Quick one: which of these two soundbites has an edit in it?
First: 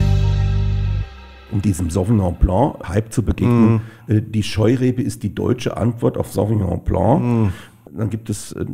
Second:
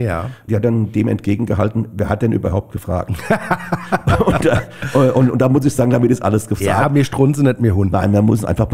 first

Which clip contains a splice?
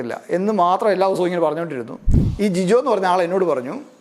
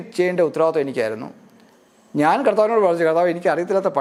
first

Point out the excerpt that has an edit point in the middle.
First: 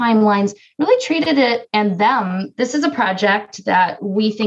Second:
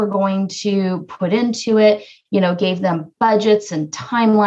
first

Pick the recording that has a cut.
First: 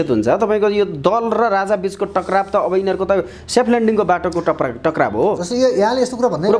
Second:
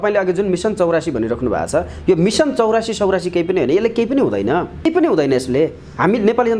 second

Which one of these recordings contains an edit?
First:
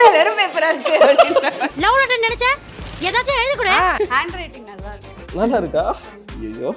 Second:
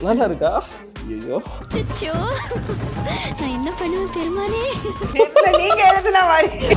first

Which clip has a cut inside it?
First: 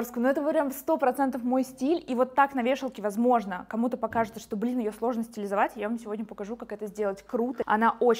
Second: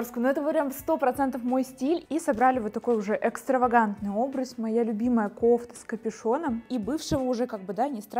second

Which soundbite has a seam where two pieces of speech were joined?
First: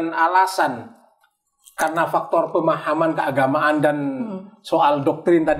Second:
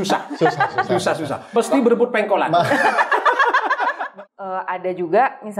second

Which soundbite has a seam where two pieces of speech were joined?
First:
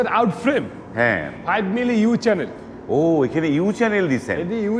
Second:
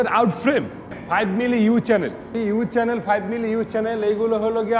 second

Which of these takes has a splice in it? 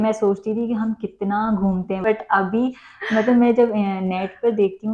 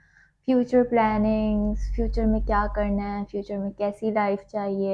first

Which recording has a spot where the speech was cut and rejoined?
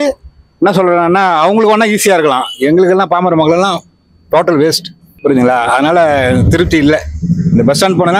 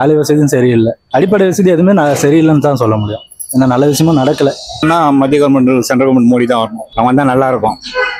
second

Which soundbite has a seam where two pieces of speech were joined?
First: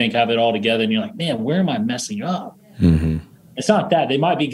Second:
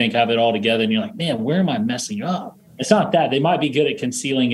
second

